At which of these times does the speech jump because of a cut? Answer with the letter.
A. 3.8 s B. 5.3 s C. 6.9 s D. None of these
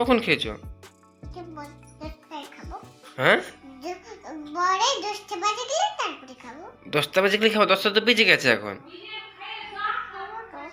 D